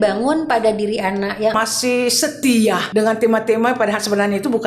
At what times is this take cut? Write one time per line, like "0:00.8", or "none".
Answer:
0:01.6